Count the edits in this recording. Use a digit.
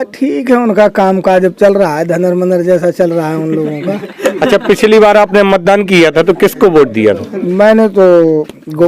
0